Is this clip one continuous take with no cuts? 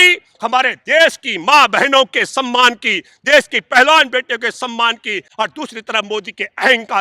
no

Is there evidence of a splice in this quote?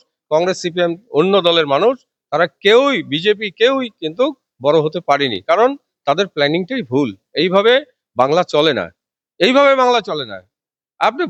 no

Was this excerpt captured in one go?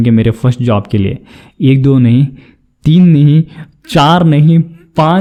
yes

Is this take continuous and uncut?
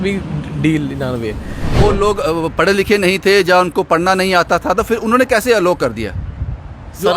no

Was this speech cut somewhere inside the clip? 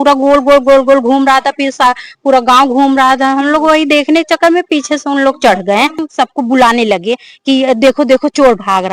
yes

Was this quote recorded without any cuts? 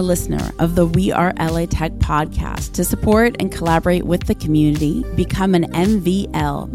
yes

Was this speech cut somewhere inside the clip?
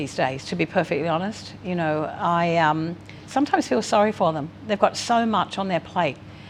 no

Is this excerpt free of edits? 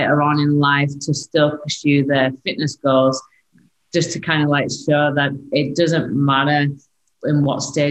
no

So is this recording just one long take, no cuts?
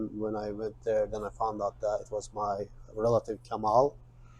yes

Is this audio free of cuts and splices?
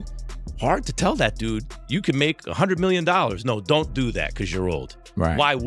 yes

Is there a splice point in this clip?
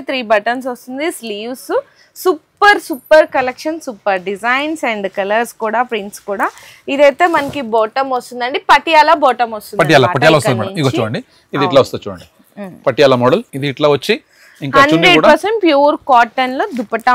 no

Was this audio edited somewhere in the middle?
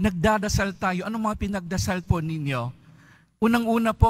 no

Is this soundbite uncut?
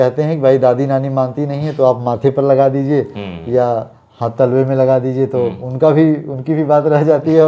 yes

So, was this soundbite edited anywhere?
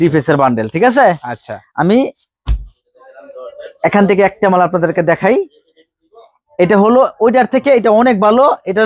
no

